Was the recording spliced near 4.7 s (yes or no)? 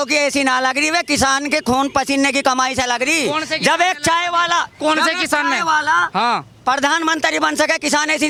no